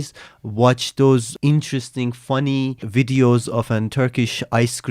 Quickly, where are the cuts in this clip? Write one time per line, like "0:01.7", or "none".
0:01.3
0:02.8